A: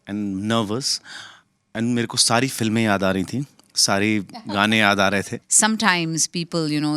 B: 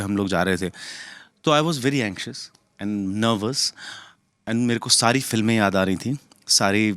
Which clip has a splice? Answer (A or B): A